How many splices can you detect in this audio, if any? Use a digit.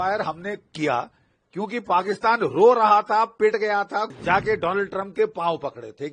1